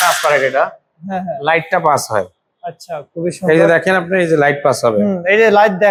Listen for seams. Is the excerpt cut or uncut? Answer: uncut